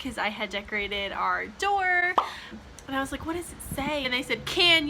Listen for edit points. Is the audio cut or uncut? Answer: uncut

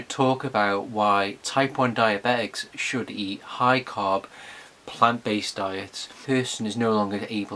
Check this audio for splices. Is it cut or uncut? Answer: uncut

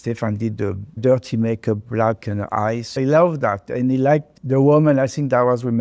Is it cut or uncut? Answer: cut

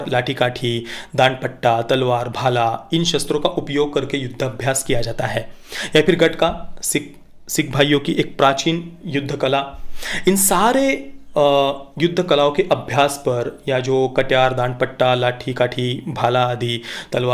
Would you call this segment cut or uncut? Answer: uncut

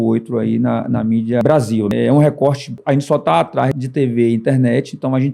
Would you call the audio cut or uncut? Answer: cut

